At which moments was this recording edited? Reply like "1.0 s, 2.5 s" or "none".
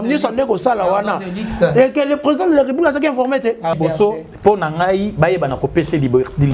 3.8 s